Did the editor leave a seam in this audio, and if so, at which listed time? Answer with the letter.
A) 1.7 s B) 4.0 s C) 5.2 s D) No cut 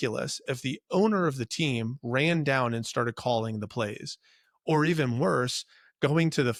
D